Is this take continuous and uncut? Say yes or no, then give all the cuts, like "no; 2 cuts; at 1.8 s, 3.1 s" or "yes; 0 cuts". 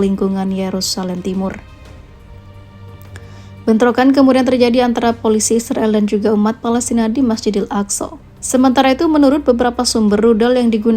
no; 2 cuts; at 1.6 s, 3.6 s